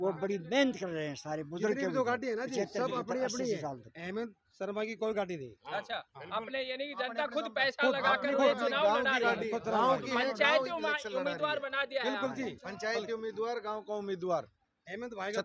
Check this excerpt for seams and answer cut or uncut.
uncut